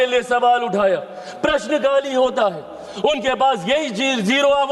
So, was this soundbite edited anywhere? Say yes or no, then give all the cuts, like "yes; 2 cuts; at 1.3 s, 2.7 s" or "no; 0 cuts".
no; 0 cuts